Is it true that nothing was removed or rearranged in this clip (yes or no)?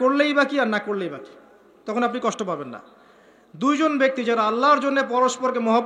yes